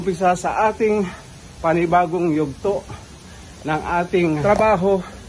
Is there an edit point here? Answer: yes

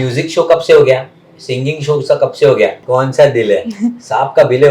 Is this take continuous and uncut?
no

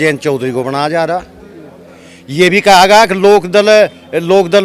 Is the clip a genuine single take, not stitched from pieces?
yes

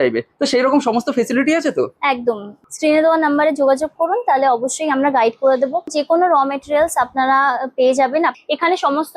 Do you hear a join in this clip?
yes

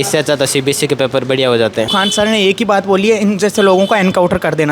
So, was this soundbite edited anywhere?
yes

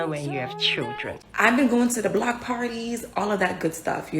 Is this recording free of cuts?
no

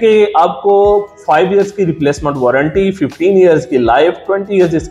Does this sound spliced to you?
no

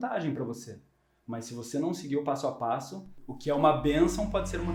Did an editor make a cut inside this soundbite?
yes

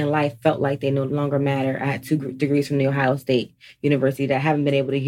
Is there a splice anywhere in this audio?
yes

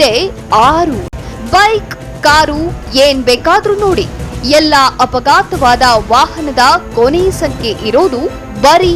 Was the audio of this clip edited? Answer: no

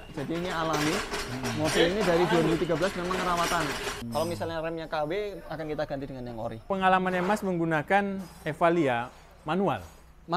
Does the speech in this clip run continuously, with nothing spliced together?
no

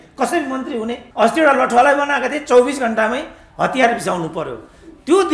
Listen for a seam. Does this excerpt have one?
yes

